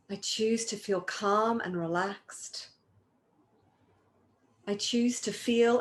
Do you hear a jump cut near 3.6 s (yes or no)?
yes